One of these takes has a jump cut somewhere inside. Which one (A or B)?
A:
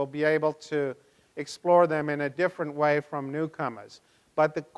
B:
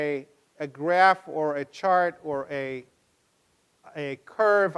B